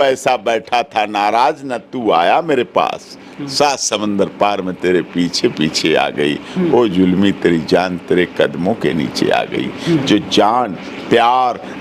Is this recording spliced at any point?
no; 0 cuts

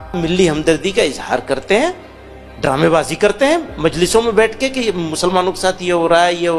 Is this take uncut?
yes; 0 cuts

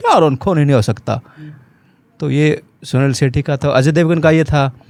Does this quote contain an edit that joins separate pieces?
no; 0 cuts

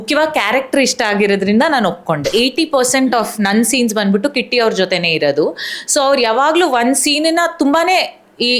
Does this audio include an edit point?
yes; 1 cut; at 2.3 s

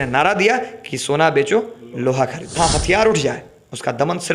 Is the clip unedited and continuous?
no; 1 cut; at 2.6 s

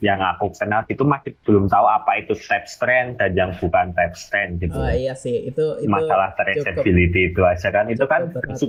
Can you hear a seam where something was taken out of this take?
no; 0 cuts

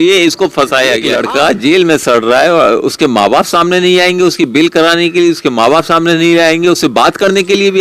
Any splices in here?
yes; 1 cut; at 1.1 s

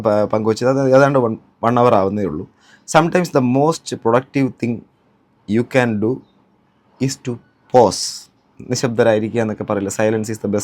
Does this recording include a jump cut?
no; 0 cuts

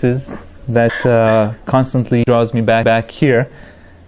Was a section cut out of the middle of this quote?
no; 0 cuts

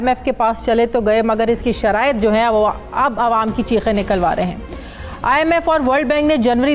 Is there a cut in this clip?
no; 0 cuts

